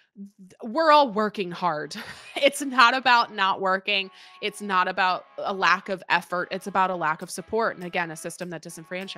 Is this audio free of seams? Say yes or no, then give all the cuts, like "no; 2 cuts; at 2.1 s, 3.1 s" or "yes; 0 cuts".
yes; 0 cuts